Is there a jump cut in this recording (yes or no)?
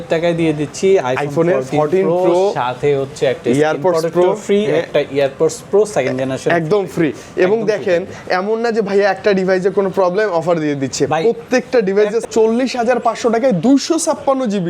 yes